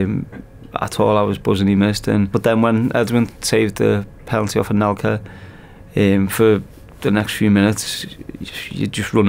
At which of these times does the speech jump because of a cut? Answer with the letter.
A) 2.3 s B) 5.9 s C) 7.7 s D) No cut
A